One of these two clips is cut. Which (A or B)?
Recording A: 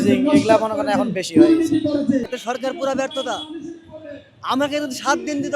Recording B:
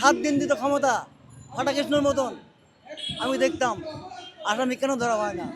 A